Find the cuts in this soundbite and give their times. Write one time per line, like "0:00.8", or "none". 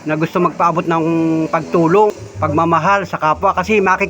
0:02.1